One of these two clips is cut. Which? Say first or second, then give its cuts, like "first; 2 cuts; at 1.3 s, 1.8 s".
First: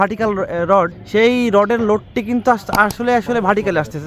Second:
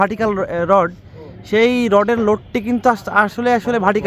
first; 1 cut; at 1.0 s